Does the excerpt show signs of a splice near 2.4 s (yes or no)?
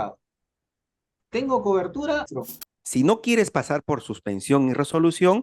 yes